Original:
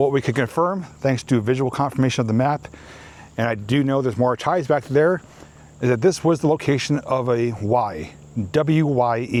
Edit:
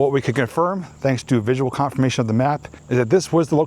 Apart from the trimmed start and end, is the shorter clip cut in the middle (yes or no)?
yes